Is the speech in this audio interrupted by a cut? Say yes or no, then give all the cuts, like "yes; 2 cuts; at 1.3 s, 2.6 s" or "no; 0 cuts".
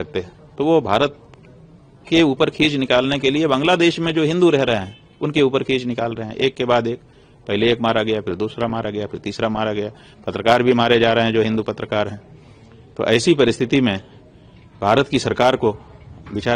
no; 0 cuts